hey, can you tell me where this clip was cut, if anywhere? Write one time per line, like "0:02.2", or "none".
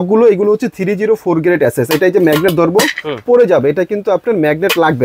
none